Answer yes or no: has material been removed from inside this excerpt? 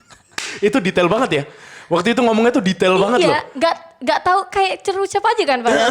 no